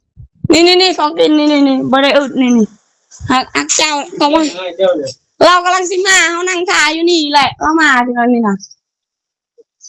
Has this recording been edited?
no; 0 cuts

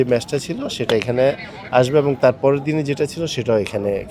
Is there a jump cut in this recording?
no; 0 cuts

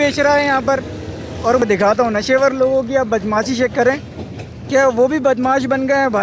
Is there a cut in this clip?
yes; 1 cut; at 1.6 s

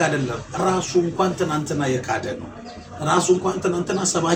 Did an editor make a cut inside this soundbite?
no; 0 cuts

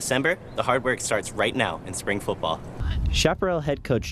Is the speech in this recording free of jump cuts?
yes; 0 cuts

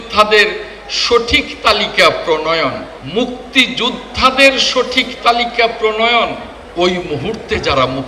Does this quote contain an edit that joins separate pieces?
yes; 2 cuts; at 3.0 s, 6.6 s

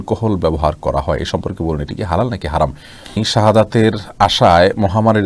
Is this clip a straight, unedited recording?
no; 1 cut; at 3.2 s

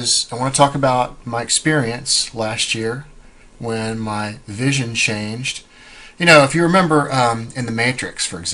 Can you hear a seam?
yes; 1 cut; at 4.4 s

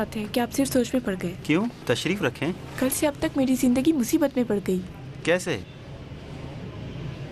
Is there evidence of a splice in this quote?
no; 0 cuts

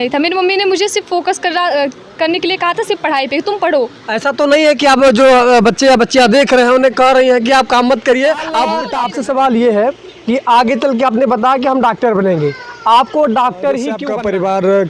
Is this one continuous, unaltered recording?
no; 2 cuts; at 8.8 s, 14.0 s

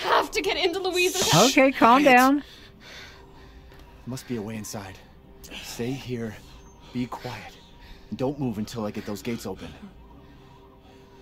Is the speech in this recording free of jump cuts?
yes; 0 cuts

